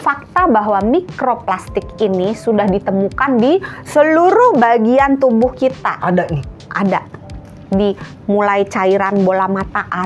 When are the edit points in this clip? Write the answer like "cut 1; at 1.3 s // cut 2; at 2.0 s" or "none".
none